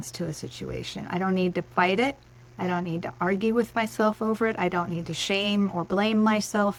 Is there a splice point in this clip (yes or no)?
no